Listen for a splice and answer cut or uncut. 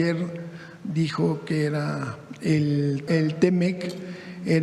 cut